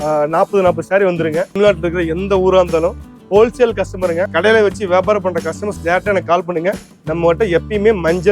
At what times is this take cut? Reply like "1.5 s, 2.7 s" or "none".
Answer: 1.5 s, 4.3 s, 6.9 s

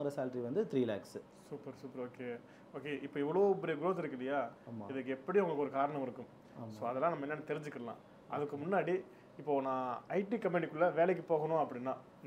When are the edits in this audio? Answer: none

